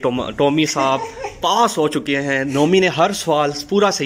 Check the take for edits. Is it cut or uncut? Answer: uncut